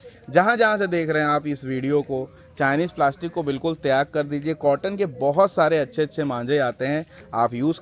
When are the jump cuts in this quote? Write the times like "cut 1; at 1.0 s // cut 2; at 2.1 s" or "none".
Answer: none